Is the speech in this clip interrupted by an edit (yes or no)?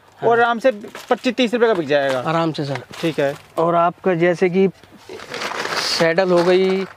no